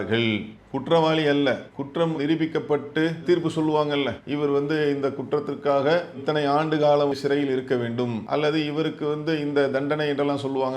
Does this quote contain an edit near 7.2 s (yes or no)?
yes